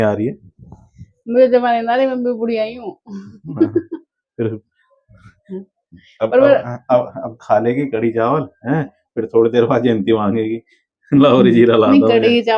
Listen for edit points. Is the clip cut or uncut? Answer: uncut